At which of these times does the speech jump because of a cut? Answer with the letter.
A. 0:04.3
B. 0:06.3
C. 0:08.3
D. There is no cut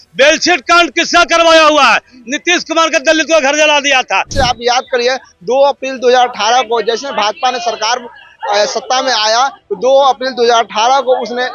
A